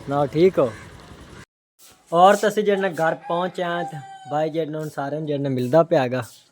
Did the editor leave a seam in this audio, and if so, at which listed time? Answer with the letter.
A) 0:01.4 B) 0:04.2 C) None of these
A